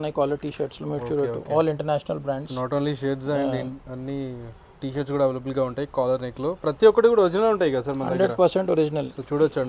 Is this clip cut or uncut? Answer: uncut